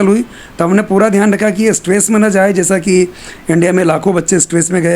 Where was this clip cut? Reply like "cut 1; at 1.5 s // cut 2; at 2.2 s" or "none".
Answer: none